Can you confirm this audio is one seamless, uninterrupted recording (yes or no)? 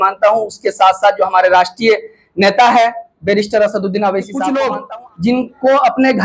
no